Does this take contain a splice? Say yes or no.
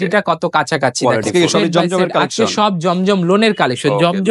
yes